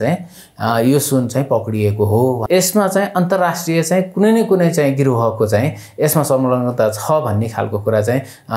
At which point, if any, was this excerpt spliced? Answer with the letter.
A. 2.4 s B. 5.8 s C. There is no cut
A